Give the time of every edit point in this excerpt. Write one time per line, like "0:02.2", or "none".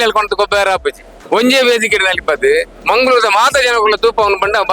0:01.1
0:02.7

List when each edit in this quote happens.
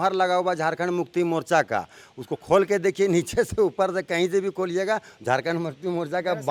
none

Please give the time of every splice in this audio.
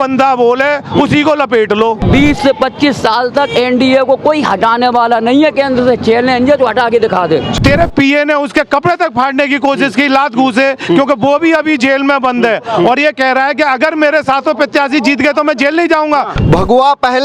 0:02.0
0:07.5
0:16.4

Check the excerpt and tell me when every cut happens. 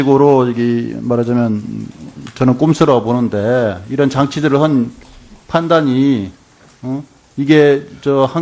none

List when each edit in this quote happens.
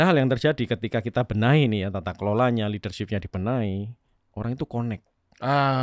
none

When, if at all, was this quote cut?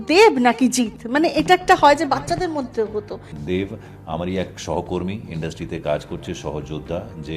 0:03.3

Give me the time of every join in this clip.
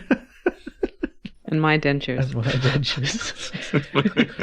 0:01.3

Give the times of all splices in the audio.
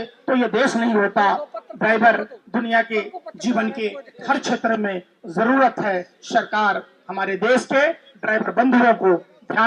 none

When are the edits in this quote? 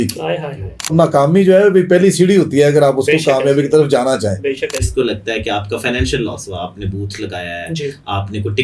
0:00.9
0:04.8

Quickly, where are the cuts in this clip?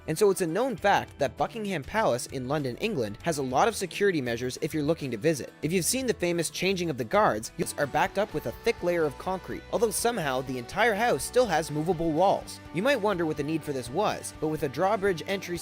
0:07.6

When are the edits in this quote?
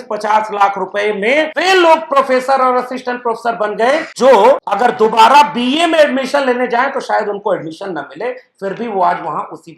0:01.5
0:04.1
0:04.7

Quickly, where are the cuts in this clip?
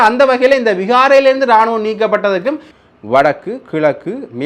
0:02.7

